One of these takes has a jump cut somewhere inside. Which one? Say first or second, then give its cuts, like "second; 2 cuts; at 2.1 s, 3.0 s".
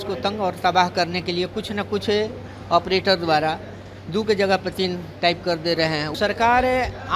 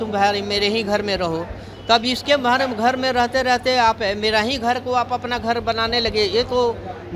first; 1 cut; at 6.1 s